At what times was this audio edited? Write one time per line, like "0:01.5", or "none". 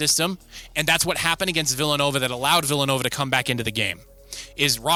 none